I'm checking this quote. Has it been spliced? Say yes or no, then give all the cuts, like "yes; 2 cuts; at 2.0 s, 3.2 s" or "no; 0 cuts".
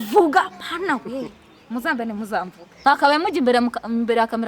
yes; 1 cut; at 2.9 s